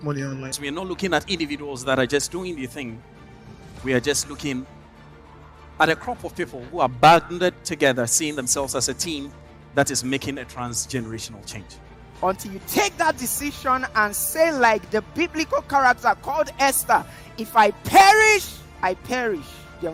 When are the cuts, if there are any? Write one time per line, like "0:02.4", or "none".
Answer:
none